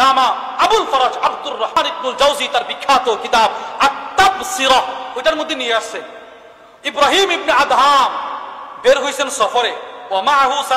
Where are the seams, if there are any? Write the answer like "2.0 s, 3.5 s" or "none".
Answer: 1.8 s